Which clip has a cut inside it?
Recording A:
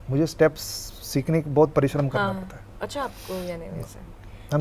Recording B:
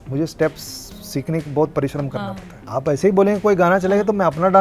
B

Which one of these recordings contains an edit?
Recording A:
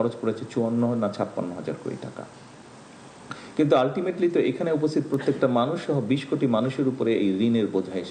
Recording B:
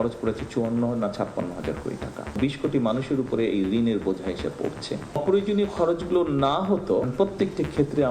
B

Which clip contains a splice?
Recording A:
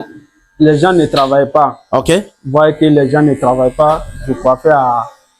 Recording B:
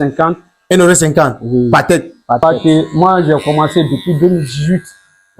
B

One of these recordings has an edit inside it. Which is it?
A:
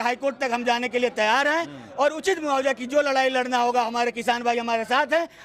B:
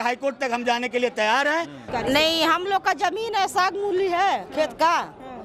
B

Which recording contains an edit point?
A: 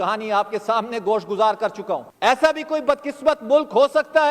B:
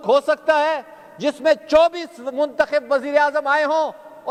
A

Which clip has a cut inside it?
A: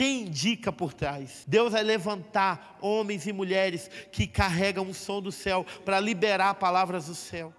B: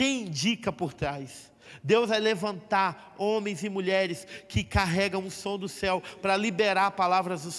A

